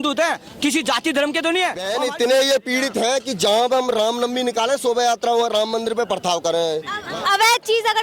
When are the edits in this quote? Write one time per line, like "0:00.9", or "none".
0:01.9
0:07.0

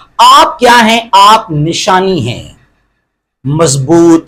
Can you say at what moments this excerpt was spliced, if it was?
none

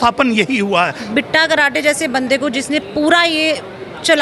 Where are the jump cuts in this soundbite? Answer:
0:01.1

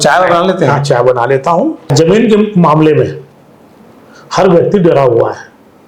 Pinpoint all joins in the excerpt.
0:01.9

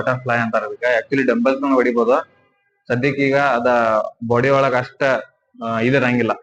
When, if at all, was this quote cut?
none

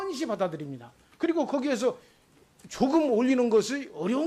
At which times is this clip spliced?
0:01.5

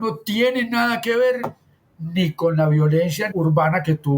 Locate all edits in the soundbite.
0:03.3

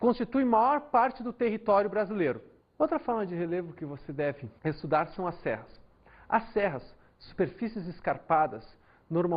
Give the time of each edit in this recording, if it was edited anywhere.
0:07.3

